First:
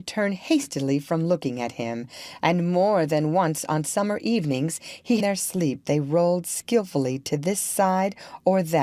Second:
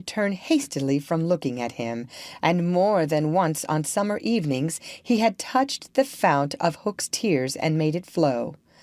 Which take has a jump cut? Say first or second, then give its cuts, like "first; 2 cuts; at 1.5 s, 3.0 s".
second; 1 cut; at 5.2 s